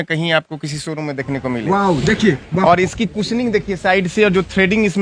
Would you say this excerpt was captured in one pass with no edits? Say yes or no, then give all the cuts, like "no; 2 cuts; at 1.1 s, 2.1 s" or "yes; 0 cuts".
yes; 0 cuts